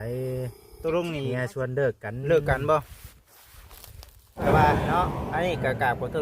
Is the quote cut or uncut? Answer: cut